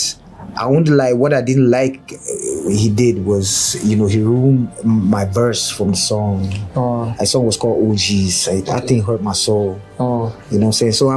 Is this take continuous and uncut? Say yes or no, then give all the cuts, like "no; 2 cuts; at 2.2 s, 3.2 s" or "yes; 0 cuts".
yes; 0 cuts